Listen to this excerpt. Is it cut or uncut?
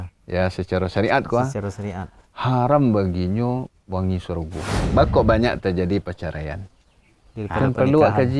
cut